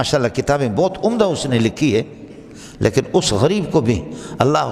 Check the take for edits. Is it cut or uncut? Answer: uncut